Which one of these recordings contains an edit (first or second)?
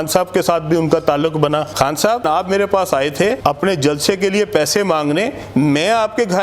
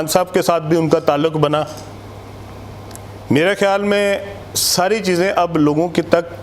first